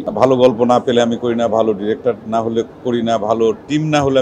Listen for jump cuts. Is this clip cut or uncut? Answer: uncut